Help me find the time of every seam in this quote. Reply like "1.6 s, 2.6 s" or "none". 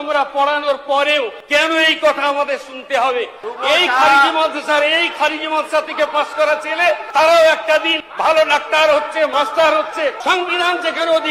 1.4 s, 3.4 s, 7.0 s, 8.0 s, 9.3 s, 10.2 s